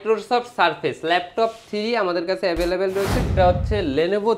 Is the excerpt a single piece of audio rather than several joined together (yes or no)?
no